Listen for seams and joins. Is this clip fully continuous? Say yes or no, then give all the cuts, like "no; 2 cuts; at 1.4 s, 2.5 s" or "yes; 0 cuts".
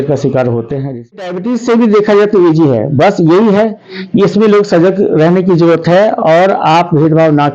no; 1 cut; at 1.3 s